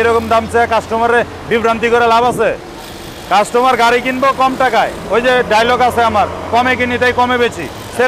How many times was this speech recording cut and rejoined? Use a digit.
0